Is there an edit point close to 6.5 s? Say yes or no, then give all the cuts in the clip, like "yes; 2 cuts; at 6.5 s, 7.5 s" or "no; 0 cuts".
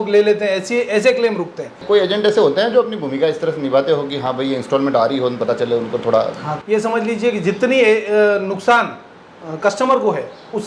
yes; 2 cuts; at 1.7 s, 6.5 s